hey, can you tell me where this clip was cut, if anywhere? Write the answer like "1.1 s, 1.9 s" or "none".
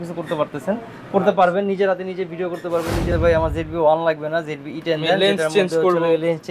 3.1 s

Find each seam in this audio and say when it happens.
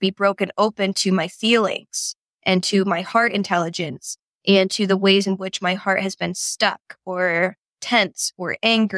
none

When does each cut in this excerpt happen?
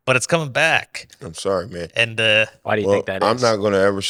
none

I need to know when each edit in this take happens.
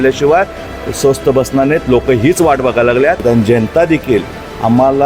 3.2 s

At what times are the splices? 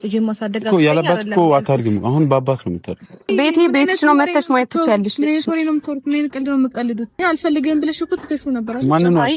3.3 s, 7.2 s

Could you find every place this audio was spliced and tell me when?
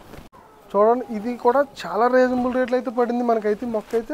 none

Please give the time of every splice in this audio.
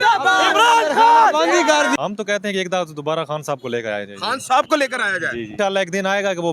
2.0 s, 5.5 s

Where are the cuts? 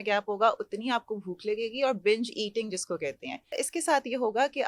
3.6 s

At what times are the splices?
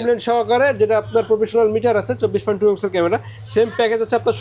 none

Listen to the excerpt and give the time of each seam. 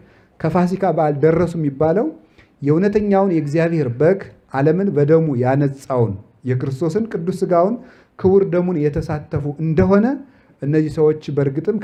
none

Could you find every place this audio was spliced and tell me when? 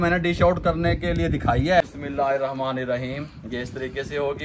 1.8 s

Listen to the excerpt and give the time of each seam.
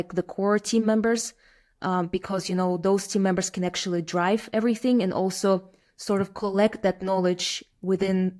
none

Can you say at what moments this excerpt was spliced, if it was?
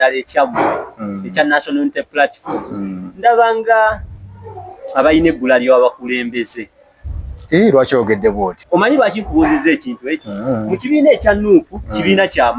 8.5 s

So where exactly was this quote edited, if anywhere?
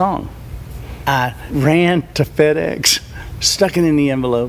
1.0 s, 2.1 s

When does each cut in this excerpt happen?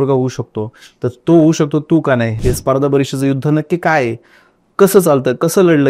2.3 s

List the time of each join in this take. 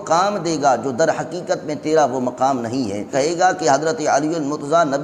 3.1 s

